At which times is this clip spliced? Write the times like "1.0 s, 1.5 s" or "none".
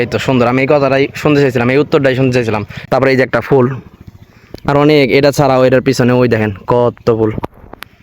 2.7 s